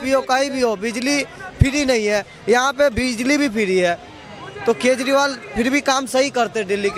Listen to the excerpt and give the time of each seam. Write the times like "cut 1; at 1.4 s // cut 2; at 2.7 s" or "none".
none

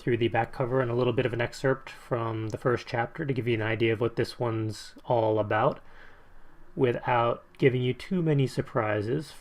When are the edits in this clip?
cut 1; at 3.4 s

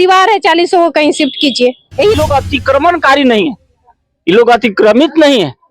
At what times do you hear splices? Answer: cut 1; at 2.1 s

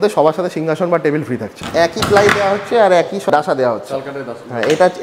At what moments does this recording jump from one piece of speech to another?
cut 1; at 1.6 s // cut 2; at 3.3 s

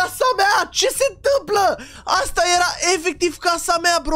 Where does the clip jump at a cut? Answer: none

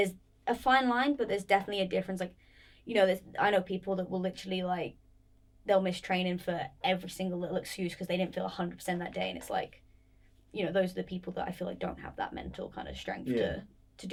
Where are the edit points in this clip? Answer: none

